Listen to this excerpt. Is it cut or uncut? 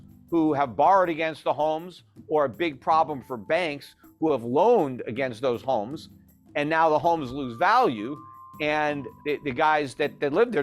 cut